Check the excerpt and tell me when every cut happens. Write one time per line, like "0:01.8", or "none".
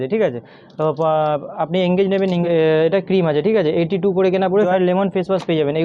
0:02.4
0:04.7